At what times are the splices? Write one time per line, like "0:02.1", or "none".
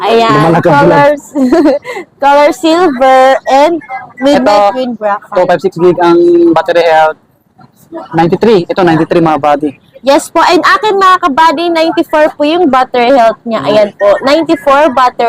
none